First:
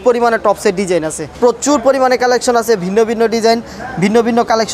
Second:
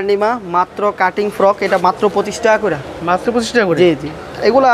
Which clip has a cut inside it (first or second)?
first